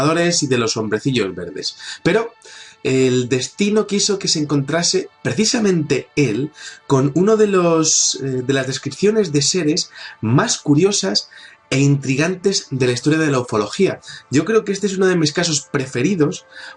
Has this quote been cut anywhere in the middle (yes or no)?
no